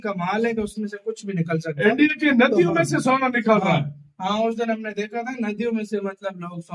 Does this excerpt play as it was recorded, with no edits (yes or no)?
yes